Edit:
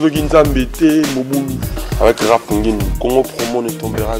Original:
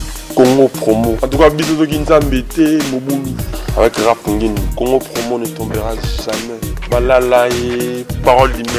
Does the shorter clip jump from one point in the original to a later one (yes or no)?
no